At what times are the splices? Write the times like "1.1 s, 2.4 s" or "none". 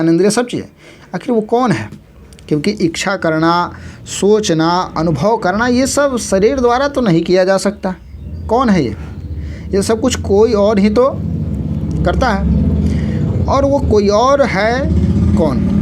none